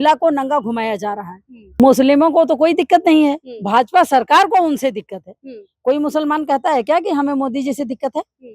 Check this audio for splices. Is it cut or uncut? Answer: cut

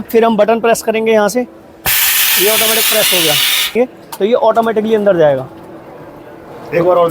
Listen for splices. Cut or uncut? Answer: cut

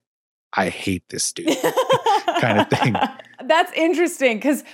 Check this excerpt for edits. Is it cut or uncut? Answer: cut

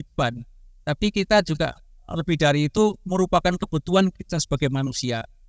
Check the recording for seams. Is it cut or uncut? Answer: uncut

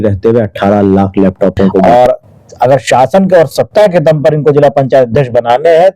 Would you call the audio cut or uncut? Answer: cut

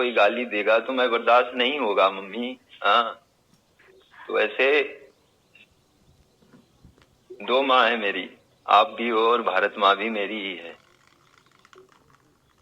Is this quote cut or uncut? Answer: uncut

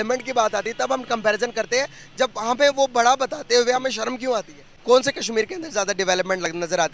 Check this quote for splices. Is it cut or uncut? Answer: cut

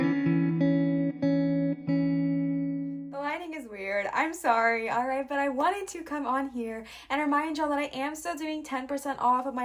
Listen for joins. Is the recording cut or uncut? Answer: cut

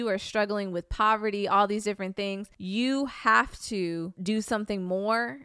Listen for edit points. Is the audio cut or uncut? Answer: cut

